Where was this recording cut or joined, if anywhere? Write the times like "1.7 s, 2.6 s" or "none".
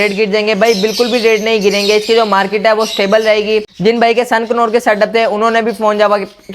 3.7 s